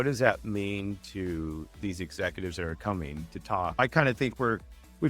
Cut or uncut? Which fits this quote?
cut